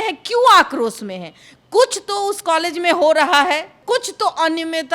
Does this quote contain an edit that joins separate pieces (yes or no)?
yes